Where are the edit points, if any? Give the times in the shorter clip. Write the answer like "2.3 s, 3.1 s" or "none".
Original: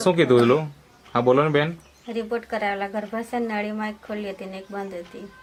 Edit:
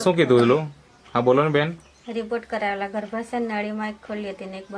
none

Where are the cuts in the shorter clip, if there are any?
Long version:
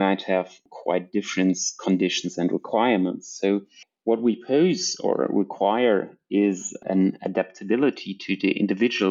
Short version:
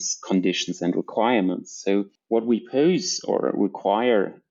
2.2 s

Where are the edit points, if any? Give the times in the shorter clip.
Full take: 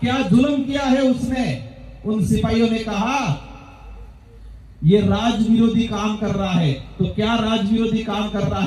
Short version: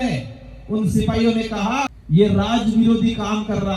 2.0 s

